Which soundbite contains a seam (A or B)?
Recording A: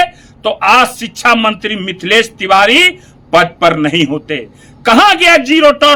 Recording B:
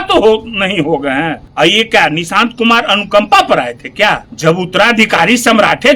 B